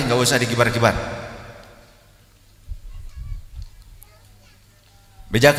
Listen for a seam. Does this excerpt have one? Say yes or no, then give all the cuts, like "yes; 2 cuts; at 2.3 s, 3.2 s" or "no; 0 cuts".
no; 0 cuts